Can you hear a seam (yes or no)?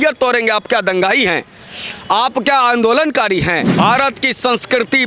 yes